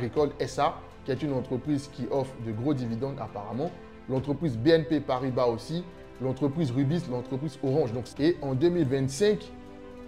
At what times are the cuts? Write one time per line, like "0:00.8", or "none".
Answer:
0:08.0